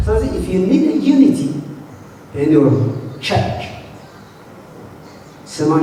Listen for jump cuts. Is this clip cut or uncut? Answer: uncut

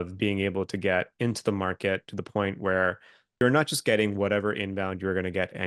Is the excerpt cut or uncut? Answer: cut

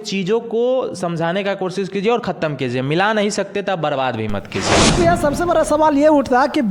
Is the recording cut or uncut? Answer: cut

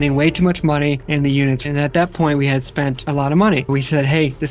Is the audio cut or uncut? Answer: cut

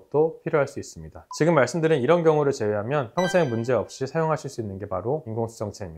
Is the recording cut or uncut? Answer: uncut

